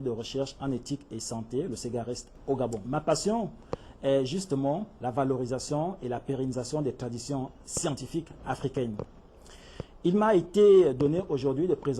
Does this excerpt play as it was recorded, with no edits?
no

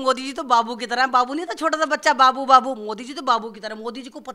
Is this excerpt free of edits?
yes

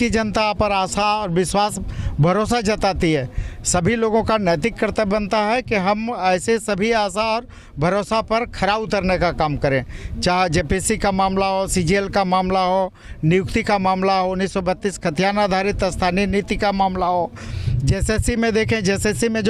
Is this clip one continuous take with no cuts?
no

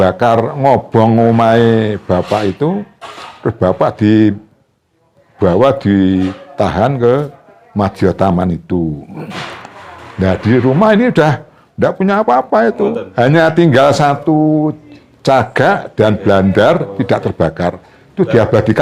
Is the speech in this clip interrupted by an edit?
no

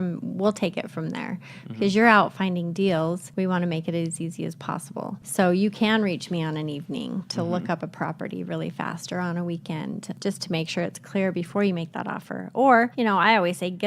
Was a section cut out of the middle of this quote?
yes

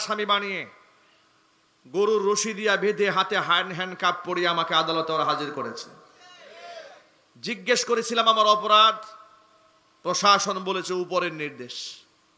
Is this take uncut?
yes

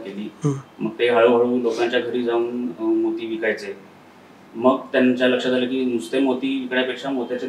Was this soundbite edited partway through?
no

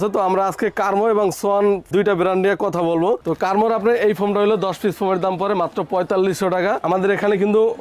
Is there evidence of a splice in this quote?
yes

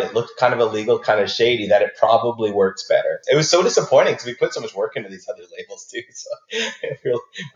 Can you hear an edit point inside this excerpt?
yes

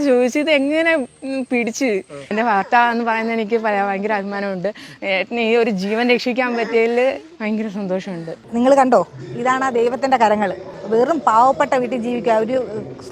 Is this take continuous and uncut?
no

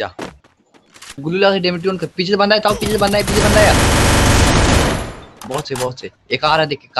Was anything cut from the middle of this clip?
yes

